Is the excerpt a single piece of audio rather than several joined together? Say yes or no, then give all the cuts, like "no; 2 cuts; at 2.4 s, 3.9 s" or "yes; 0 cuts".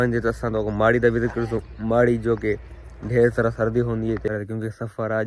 no; 1 cut; at 4.3 s